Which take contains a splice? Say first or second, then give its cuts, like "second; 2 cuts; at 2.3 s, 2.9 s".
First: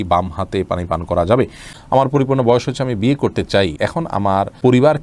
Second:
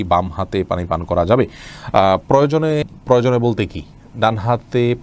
first; 2 cuts; at 1.7 s, 4.2 s